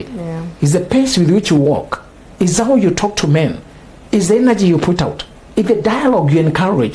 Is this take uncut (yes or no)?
yes